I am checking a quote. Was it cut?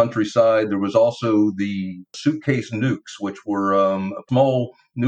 yes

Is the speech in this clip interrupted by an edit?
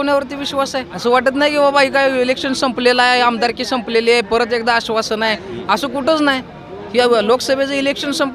yes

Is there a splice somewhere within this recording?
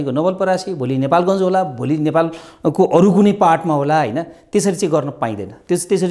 no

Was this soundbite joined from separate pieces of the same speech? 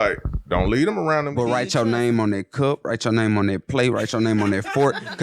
yes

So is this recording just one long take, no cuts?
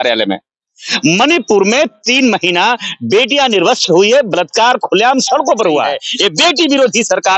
no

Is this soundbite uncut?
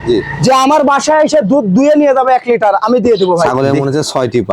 no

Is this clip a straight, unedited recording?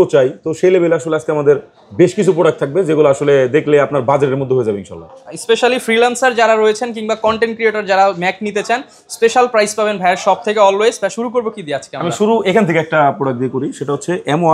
yes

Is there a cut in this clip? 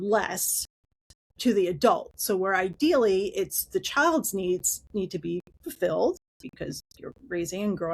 no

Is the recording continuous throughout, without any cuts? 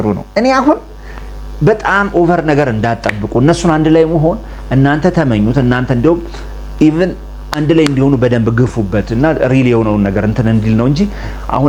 yes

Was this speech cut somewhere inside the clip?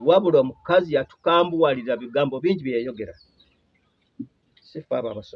no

